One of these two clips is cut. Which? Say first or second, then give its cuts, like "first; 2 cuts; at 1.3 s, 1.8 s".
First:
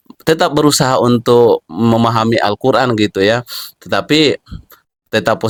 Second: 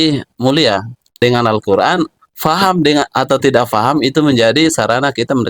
second; 1 cut; at 1.1 s